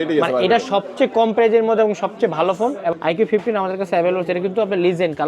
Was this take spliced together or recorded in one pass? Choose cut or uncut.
cut